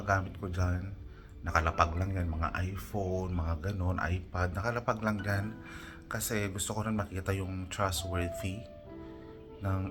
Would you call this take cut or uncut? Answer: uncut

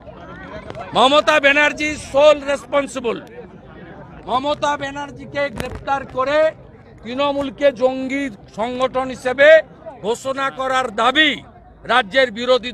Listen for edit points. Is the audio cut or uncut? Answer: uncut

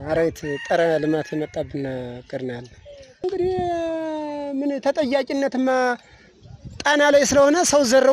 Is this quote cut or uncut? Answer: cut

